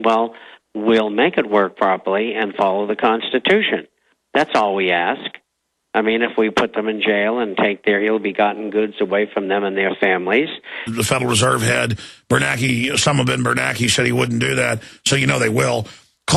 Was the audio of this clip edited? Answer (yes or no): no